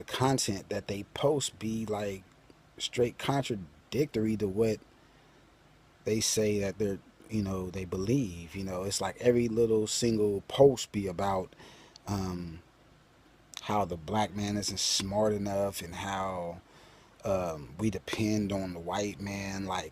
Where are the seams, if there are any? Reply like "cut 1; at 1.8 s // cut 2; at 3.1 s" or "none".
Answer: cut 1; at 15.9 s